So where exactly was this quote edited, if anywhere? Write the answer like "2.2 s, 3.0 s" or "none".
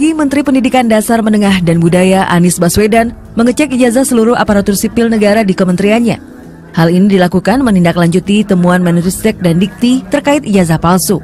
none